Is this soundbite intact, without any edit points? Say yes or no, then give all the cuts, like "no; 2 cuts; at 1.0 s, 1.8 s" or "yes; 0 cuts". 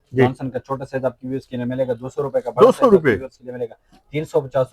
yes; 0 cuts